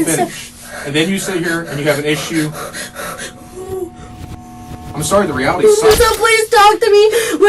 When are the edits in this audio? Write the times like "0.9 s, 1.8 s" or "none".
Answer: 6.1 s